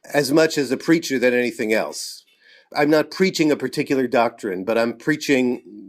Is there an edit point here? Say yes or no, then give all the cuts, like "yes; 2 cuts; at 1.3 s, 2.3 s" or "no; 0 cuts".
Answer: yes; 1 cut; at 2.7 s